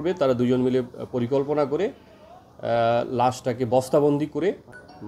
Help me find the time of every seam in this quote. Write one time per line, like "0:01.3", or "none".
none